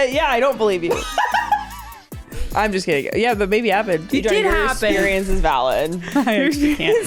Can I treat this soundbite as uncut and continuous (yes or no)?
yes